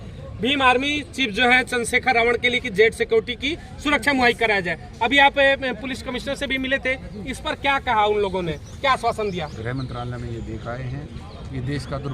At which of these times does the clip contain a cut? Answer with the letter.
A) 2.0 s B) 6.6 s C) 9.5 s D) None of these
C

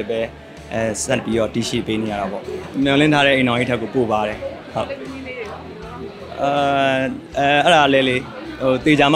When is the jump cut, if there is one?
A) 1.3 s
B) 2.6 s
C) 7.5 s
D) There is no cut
B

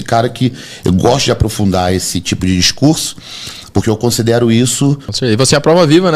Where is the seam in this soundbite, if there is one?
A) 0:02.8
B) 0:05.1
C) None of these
B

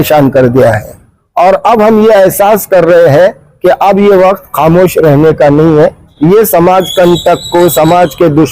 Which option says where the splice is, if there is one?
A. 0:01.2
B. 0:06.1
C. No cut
B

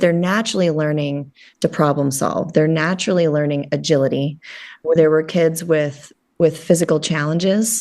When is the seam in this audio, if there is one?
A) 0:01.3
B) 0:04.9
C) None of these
B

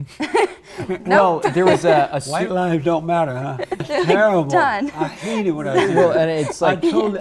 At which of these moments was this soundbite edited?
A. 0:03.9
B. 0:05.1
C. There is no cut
A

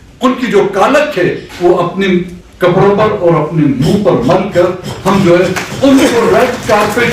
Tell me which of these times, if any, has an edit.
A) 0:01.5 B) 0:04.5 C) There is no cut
A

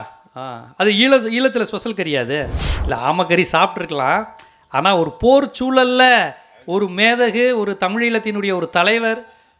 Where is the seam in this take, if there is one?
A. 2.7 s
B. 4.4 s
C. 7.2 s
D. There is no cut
A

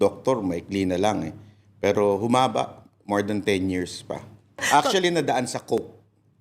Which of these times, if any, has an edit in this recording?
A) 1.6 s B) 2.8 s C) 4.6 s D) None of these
C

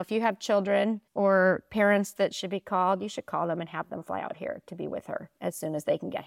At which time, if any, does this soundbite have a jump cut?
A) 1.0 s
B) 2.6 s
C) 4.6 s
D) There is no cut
A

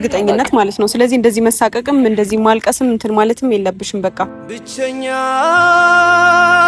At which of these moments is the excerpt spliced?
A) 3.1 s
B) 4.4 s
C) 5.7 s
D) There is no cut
B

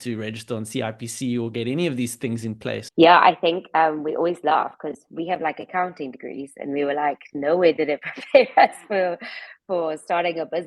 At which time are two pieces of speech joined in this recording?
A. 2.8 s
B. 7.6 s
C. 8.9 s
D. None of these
A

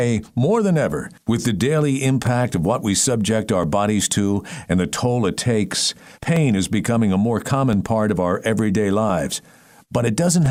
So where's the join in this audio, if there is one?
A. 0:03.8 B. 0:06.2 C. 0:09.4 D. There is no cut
D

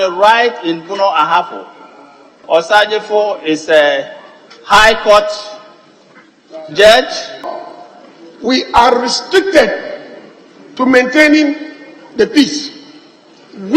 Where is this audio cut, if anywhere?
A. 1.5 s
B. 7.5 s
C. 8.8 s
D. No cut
B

